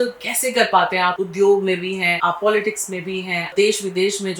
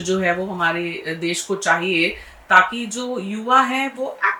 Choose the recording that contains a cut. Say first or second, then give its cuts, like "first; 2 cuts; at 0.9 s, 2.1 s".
first; 3 cuts; at 1.2 s, 2.1 s, 3.5 s